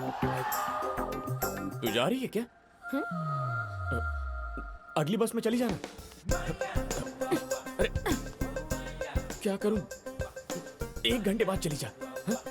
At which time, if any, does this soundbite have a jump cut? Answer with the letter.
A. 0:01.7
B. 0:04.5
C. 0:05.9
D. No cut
A